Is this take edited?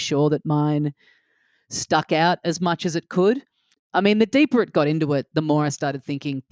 yes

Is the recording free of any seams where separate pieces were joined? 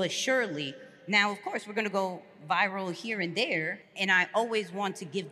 no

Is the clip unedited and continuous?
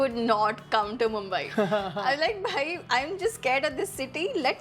yes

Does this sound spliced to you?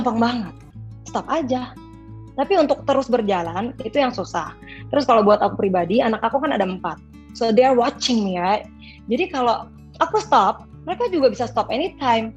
no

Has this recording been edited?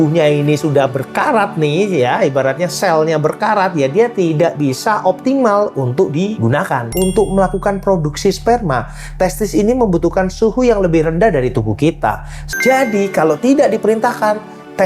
yes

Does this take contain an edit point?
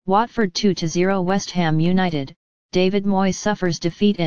yes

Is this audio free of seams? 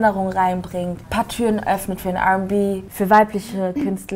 no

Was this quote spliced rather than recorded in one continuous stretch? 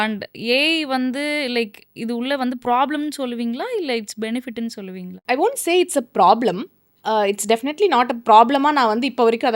no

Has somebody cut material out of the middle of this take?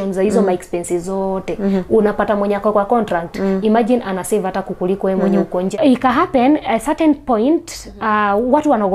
yes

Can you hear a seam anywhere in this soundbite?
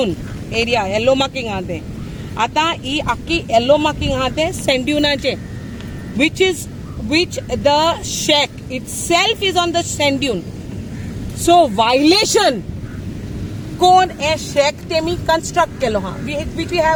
no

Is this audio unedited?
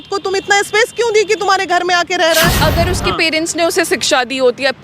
no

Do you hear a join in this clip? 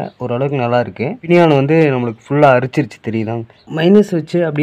yes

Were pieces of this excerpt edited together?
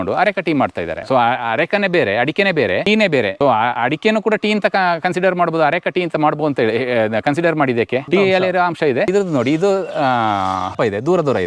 yes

